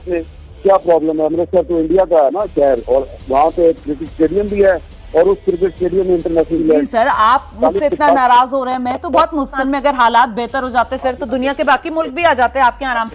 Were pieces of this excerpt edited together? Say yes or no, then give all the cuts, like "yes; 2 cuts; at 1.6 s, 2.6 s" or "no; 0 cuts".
yes; 2 cuts; at 6.6 s, 9.5 s